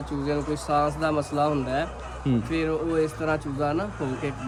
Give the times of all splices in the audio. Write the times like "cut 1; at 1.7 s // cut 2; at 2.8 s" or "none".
none